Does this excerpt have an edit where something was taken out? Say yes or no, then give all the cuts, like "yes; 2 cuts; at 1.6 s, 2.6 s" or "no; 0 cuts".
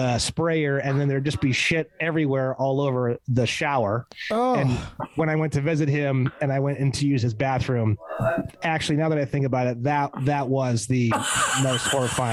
no; 0 cuts